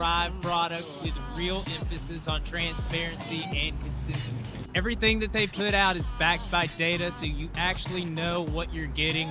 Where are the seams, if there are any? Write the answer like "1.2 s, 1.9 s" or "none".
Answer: none